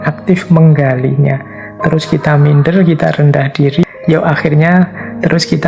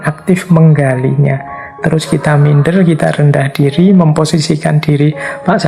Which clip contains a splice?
first; 1 cut; at 3.8 s

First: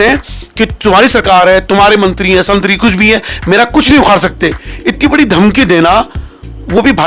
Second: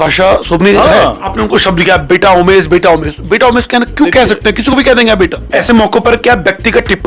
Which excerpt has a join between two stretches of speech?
second; 2 cuts; at 1.3 s, 5.5 s

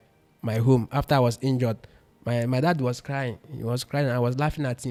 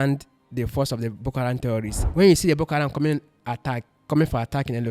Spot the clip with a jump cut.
second; 1 cut; at 2.0 s

